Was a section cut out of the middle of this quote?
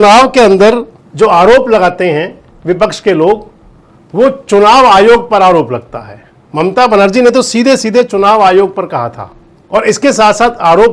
no; 0 cuts

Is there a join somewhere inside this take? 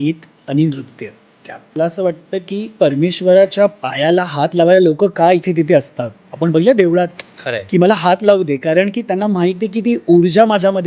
yes; 1 cut; at 1.8 s

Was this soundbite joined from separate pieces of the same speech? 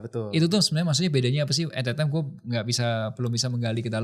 no; 0 cuts

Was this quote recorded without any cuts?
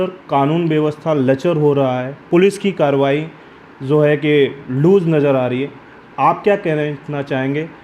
yes; 0 cuts

